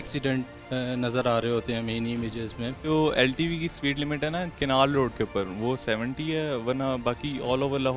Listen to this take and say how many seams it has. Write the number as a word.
one